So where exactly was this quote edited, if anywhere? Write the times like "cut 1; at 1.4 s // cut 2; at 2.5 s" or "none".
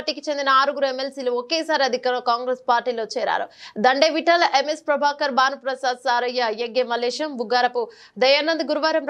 none